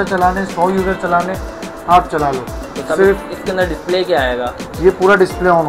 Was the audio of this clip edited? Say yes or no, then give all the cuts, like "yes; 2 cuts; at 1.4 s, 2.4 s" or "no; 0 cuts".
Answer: no; 0 cuts